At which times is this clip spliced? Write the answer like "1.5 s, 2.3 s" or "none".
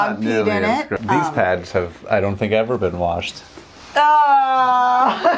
1.0 s

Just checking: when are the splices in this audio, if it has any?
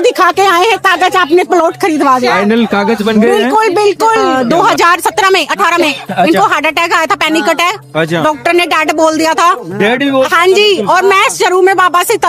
4.3 s

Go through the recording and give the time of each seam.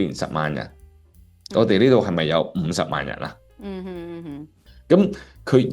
4.6 s

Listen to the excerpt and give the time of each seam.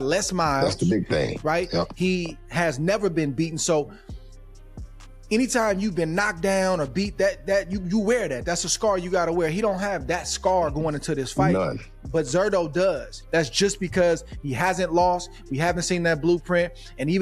13.2 s

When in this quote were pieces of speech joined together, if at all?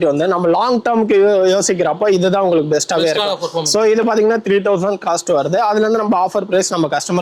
none

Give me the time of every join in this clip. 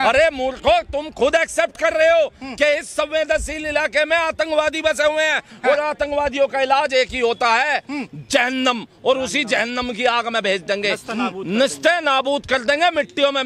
none

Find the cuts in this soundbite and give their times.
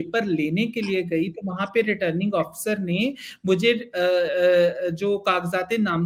none

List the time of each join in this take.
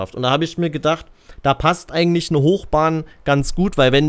none

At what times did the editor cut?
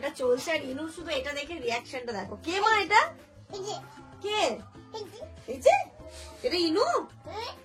none

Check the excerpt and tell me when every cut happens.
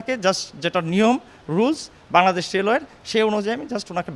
none

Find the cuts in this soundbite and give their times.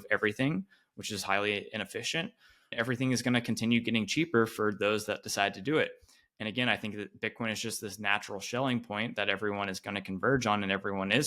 2.7 s

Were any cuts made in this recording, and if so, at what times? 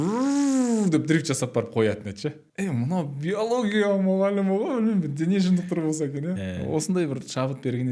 2.4 s, 6.5 s

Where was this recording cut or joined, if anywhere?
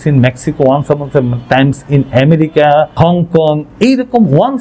2.9 s

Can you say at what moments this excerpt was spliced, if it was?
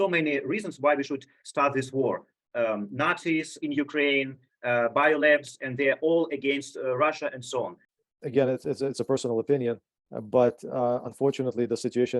7.8 s

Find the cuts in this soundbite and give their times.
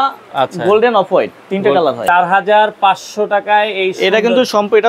2.0 s

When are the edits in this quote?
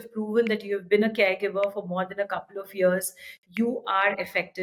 none

